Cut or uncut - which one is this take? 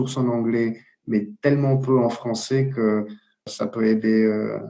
cut